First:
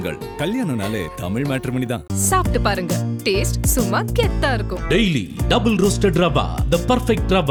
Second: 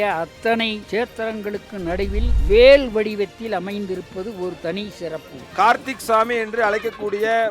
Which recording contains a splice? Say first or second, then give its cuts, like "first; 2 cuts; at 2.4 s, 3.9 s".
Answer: second; 3 cuts; at 0.8 s, 2.3 s, 5.5 s